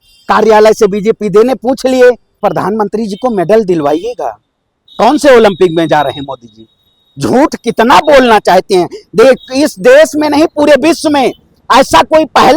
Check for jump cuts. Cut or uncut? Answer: cut